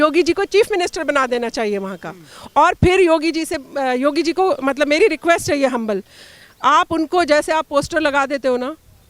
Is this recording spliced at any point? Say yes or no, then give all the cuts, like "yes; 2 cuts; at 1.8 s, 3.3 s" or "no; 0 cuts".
no; 0 cuts